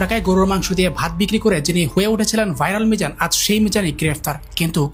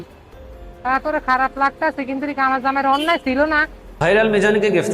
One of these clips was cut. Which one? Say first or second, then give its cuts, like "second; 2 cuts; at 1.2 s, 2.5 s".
second; 1 cut; at 3.9 s